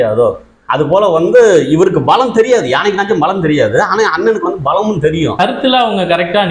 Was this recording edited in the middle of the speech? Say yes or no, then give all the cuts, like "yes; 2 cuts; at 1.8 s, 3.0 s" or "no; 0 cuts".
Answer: yes; 1 cut; at 5.4 s